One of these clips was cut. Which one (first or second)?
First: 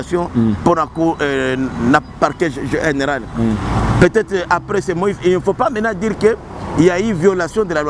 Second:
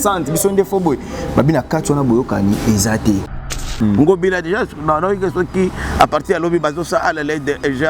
second